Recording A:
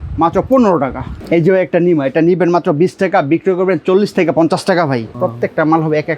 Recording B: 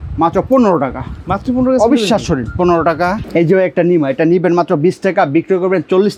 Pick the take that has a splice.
A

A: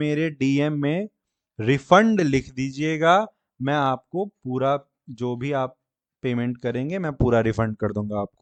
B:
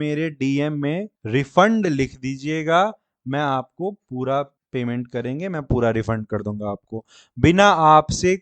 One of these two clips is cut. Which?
B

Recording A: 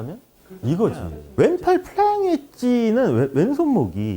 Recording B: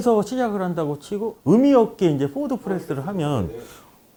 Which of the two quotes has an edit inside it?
A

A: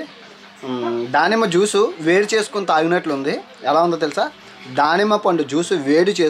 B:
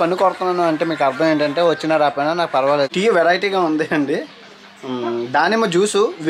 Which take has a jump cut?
B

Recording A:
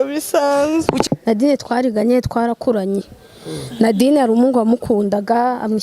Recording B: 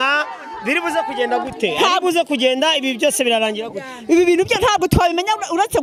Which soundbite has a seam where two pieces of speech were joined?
A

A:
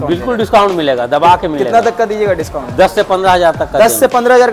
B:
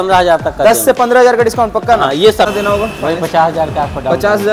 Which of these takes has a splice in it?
B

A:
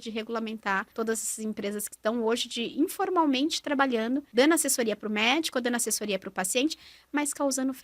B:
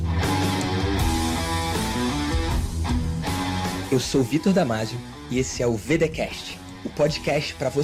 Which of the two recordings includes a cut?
A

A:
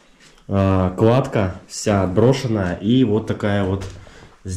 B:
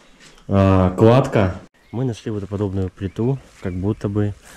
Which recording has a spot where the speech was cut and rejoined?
B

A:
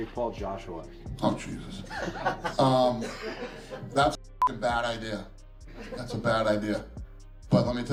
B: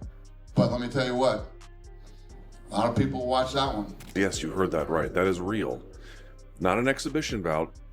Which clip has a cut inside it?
B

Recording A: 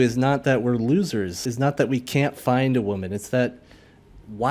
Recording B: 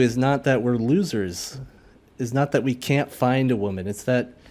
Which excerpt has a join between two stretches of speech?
A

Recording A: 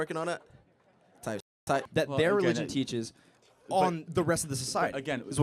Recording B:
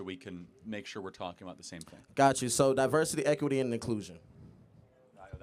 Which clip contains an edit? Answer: A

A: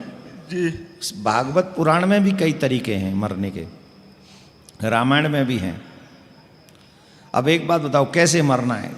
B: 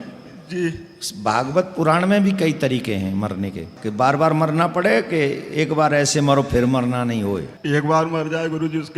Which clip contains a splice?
B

